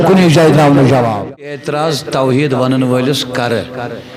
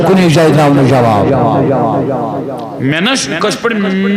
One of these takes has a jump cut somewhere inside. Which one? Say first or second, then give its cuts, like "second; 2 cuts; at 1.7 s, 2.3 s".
first; 1 cut; at 1.3 s